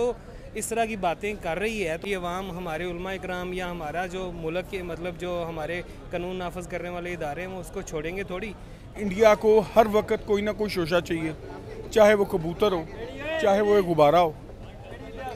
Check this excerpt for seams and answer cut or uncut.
cut